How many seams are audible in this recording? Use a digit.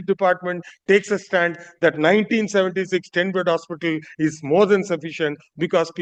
0